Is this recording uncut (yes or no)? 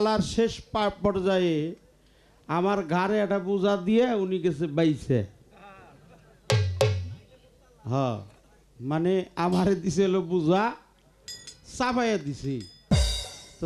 yes